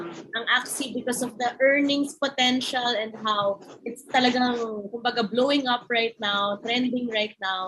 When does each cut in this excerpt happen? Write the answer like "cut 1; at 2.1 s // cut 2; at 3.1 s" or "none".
none